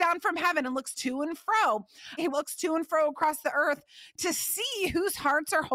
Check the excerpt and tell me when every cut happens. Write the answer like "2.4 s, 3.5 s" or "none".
2.2 s